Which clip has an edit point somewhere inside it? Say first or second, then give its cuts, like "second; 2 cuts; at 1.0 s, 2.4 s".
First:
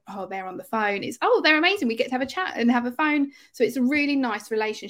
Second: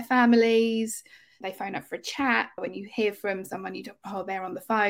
second; 2 cuts; at 1.4 s, 2.6 s